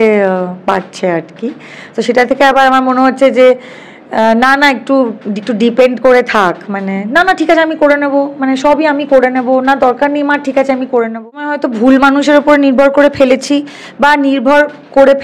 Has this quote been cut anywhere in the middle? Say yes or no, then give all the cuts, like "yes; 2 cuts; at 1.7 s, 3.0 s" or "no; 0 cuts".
yes; 1 cut; at 11.6 s